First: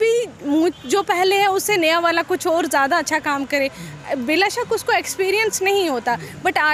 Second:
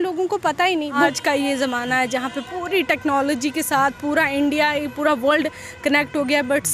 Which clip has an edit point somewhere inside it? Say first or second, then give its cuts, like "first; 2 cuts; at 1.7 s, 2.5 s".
second; 1 cut; at 1.1 s